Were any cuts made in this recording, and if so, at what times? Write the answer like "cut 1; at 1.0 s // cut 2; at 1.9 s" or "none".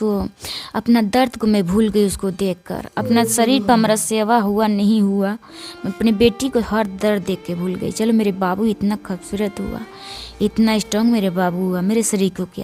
none